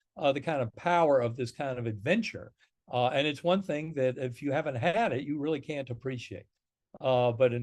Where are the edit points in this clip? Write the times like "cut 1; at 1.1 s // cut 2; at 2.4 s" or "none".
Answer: none